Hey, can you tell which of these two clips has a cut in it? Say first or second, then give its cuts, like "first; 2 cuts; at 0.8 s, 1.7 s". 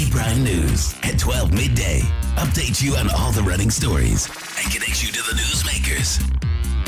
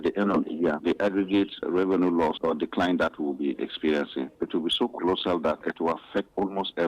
second; 4 cuts; at 0.8 s, 1.6 s, 2.4 s, 4.3 s